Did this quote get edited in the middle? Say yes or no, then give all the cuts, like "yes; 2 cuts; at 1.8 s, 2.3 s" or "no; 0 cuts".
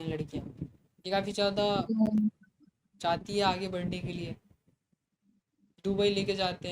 yes; 1 cut; at 5.0 s